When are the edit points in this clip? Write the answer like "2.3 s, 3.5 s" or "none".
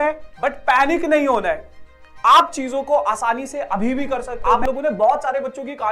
4.4 s